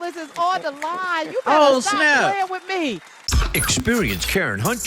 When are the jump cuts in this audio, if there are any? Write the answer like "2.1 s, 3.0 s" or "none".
3.4 s